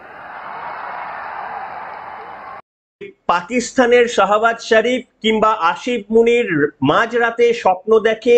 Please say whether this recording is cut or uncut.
cut